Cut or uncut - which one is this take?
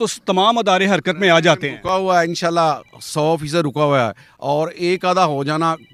uncut